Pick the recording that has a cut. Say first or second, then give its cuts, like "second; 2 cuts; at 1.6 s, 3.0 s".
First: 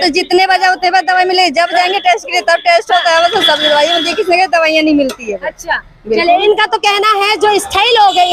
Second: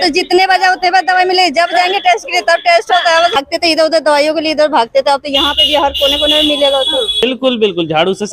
second; 2 cuts; at 3.4 s, 7.2 s